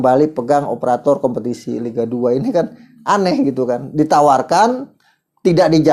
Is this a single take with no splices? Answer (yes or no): yes